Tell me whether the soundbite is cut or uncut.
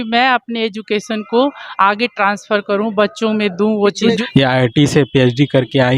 cut